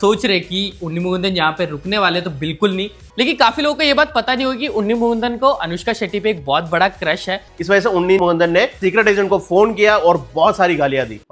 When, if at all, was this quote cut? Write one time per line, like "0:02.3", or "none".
0:03.0
0:07.5